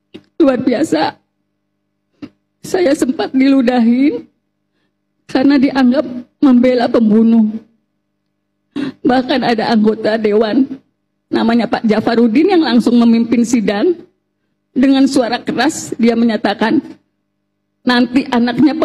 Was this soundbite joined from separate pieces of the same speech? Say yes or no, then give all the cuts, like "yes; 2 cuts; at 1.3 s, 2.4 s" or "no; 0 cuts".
no; 0 cuts